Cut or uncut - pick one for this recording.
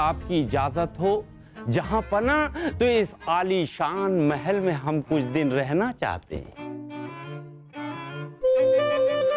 uncut